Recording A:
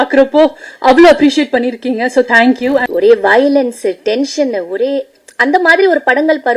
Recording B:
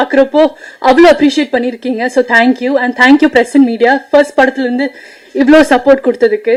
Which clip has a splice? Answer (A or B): A